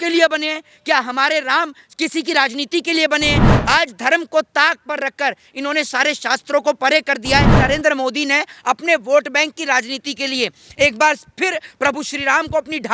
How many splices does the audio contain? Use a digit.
2